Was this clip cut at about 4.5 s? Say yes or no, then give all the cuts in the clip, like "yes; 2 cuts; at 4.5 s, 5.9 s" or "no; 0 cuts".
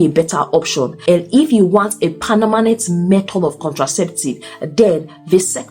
yes; 2 cuts; at 0.9 s, 4.5 s